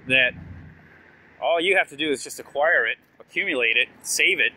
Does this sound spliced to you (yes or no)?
no